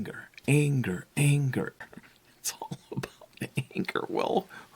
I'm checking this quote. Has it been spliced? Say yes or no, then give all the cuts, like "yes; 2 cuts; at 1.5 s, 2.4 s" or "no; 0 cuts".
yes; 1 cut; at 1.8 s